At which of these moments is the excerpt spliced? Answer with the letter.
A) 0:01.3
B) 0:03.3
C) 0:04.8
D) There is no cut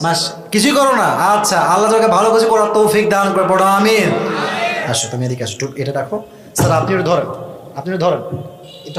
C